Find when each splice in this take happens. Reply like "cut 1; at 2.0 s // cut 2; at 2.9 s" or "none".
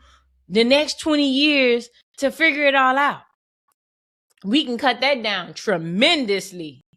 none